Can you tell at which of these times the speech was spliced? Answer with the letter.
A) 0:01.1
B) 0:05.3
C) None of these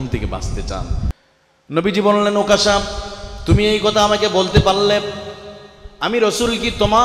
A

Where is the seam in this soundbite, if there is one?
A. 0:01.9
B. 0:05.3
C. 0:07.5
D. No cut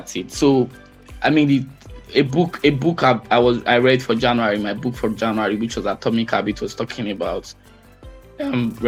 D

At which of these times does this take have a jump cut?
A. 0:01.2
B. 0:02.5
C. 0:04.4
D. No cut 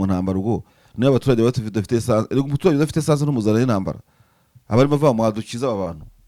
D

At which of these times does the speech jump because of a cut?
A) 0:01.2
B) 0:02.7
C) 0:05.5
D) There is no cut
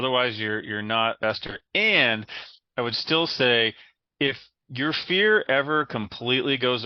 A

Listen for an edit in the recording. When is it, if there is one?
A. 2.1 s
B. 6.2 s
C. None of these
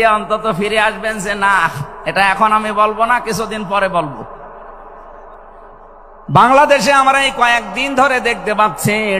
B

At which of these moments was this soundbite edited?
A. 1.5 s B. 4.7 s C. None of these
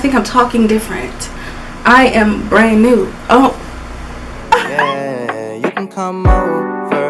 B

